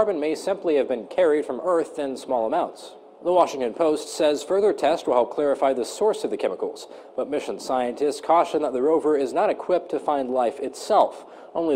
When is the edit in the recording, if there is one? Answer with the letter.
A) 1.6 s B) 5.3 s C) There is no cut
B